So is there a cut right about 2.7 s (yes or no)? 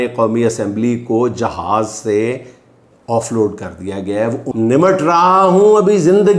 no